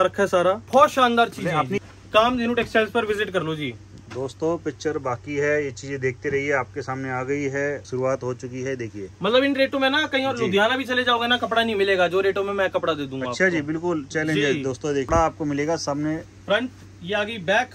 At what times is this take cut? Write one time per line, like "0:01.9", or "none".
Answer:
0:01.9
0:07.8
0:15.1